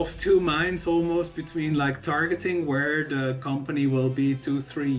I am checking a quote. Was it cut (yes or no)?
no